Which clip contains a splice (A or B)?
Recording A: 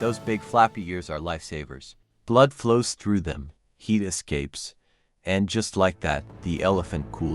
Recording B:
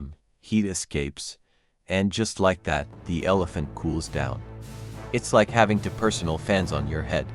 A